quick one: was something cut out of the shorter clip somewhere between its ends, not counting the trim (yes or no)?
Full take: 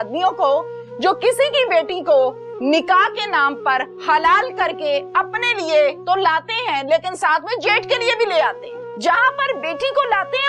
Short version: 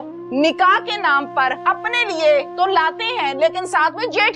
yes